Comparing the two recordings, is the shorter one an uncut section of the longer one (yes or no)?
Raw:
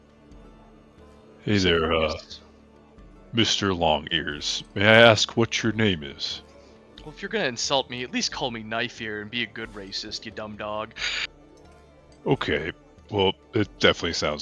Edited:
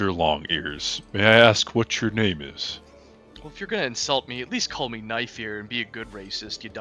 yes